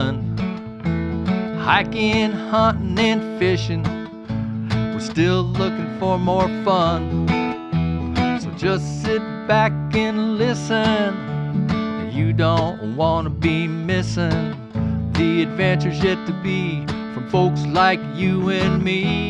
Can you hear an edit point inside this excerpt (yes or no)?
no